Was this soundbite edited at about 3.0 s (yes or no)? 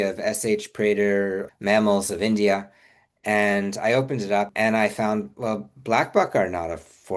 no